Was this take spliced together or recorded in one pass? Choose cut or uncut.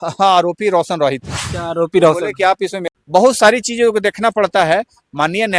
cut